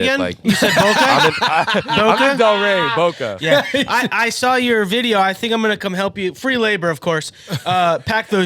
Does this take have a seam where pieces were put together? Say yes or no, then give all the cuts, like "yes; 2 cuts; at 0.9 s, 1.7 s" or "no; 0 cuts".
no; 0 cuts